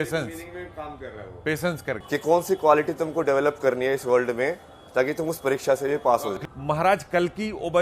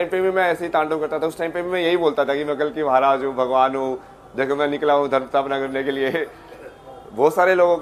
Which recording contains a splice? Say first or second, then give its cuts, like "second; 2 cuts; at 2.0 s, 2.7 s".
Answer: first; 1 cut; at 6.4 s